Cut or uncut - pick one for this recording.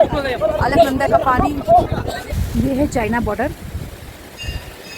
cut